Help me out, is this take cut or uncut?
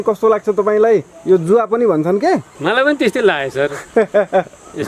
cut